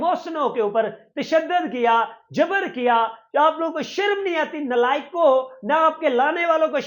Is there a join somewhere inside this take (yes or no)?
no